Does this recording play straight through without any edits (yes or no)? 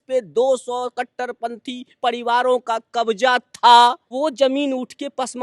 no